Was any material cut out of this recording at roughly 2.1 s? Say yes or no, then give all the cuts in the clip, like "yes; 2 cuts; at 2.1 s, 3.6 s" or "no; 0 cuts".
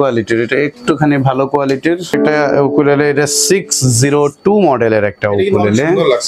yes; 1 cut; at 2.1 s